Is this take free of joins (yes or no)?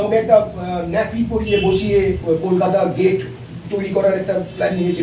no